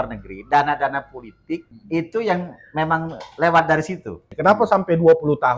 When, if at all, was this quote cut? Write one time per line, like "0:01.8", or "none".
0:01.7
0:04.3